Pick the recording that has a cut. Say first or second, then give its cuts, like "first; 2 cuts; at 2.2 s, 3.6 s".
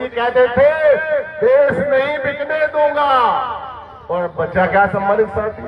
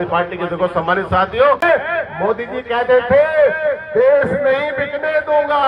second; 1 cut; at 1.6 s